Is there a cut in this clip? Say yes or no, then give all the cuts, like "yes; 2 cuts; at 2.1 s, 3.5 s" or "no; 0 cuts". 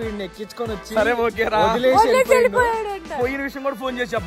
no; 0 cuts